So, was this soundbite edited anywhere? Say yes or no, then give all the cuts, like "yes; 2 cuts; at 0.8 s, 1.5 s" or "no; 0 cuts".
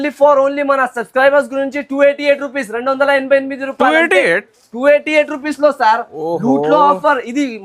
no; 0 cuts